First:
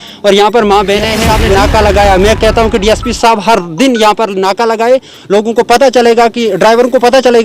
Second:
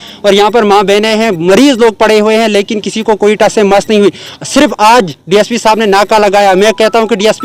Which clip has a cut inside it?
first; 1 cut; at 1.2 s

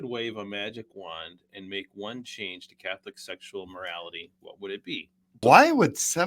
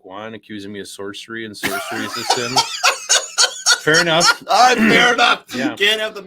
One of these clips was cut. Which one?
first; 1 cut; at 5.3 s

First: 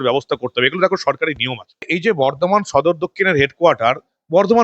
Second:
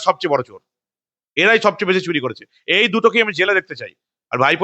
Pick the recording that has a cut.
first; 1 cut; at 1.9 s

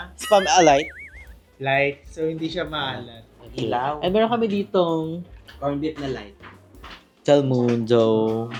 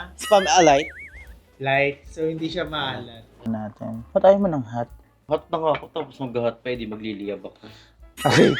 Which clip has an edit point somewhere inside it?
second; 1 cut; at 3.5 s

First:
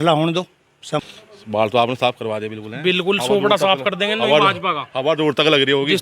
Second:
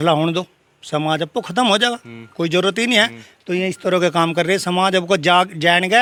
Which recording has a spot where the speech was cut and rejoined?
first; 1 cut; at 1.0 s

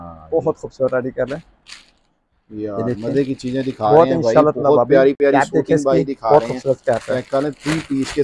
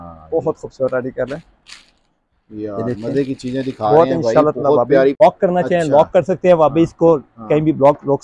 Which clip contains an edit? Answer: second; 1 cut; at 5.1 s

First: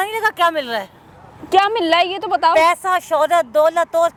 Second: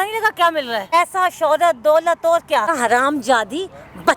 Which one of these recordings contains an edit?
second; 2 cuts; at 0.9 s, 2.8 s

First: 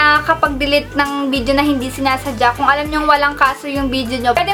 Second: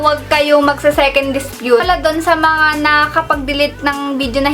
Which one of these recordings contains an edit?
second; 1 cut; at 1.8 s

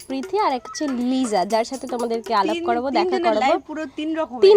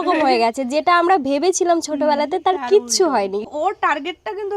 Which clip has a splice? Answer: second; 1 cut; at 3.5 s

